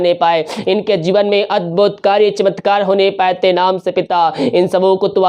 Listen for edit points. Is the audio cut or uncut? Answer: uncut